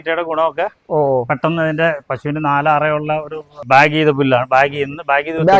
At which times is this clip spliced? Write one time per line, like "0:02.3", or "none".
0:03.6